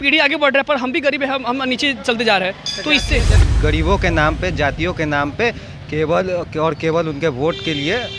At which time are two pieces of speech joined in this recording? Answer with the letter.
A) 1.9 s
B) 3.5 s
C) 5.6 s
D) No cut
B